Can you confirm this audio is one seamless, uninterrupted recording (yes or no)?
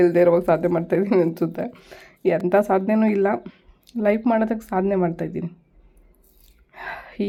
yes